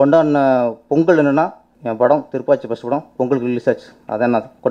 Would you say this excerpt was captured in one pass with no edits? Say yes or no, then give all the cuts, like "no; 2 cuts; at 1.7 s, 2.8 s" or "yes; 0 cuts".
no; 1 cut; at 1.7 s